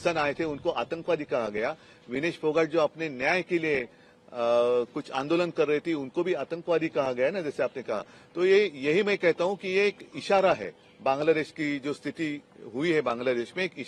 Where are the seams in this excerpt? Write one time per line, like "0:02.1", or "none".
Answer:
none